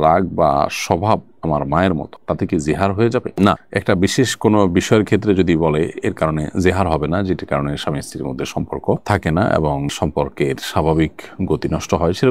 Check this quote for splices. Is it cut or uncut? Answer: uncut